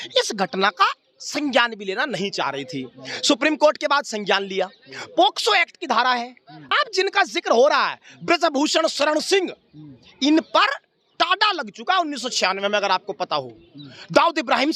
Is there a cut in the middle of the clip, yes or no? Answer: yes